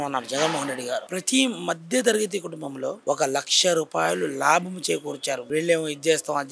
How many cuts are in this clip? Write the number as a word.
two